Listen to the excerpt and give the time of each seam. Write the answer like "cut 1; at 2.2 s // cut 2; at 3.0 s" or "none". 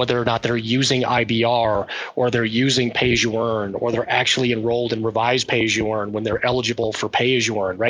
none